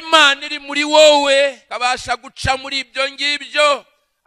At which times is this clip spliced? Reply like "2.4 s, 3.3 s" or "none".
1.7 s